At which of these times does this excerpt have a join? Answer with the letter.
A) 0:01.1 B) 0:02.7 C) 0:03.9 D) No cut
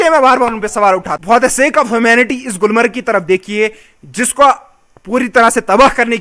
A